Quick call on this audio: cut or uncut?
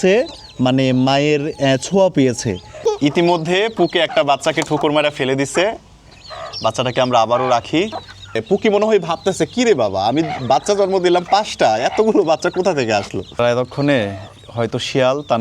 cut